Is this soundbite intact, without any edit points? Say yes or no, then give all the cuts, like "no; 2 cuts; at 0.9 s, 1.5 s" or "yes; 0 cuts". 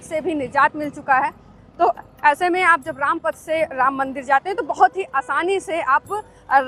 yes; 0 cuts